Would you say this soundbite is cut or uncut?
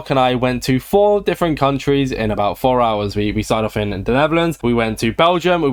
uncut